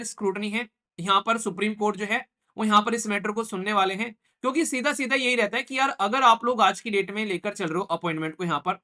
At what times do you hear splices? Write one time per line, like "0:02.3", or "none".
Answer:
none